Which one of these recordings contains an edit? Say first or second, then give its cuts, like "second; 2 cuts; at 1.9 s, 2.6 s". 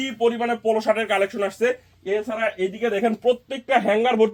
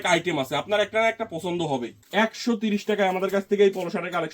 second; 1 cut; at 2.0 s